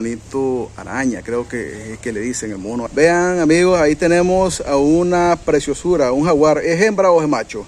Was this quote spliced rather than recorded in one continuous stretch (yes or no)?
yes